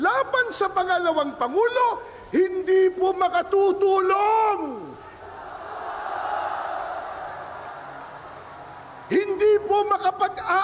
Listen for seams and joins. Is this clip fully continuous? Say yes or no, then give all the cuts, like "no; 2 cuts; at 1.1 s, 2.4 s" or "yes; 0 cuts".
yes; 0 cuts